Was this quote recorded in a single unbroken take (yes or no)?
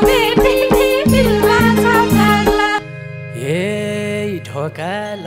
no